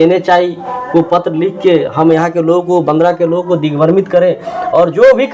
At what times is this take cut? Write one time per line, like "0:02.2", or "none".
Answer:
none